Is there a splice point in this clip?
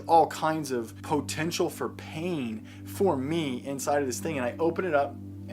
yes; 1 cut; at 1.0 s

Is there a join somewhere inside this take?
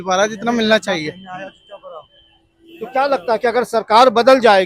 no; 0 cuts

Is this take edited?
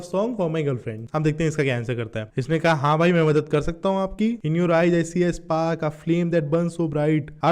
yes; 3 cuts; at 1.0 s, 2.3 s, 4.4 s

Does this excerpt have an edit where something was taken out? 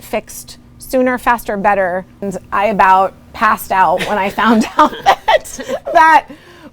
yes; 1 cut; at 2.2 s

